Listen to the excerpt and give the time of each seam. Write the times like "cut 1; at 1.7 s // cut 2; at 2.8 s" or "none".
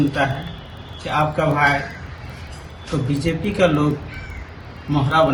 none

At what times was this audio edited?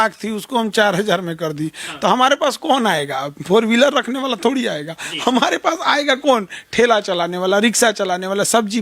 none

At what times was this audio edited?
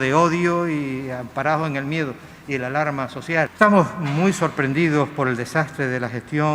cut 1; at 3.5 s

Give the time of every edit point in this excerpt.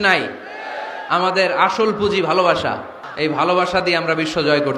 cut 1; at 3.0 s

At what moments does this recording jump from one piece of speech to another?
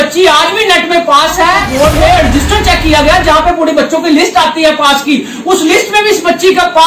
cut 1; at 1.7 s

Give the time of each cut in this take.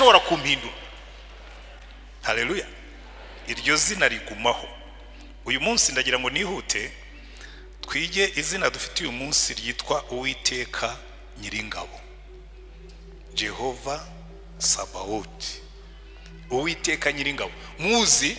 none

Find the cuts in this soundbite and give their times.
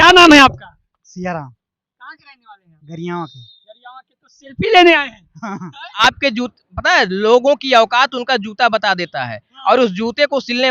cut 1; at 5.9 s

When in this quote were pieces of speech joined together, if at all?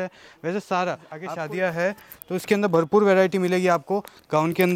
cut 1; at 1.1 s

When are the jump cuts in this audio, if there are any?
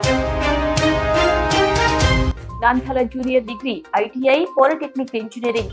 none

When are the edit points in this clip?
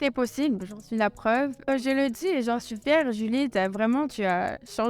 cut 1; at 1.7 s

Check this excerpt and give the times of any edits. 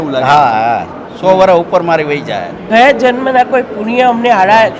cut 1; at 2.5 s

